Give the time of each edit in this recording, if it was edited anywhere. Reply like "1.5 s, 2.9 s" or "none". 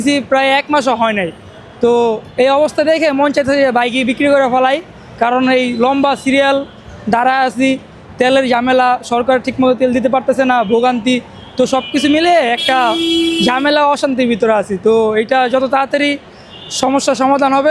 none